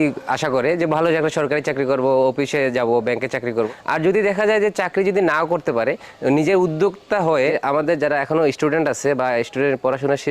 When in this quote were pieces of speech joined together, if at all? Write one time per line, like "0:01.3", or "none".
0:03.6
0:07.6